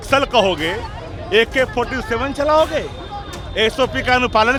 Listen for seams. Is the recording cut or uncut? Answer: uncut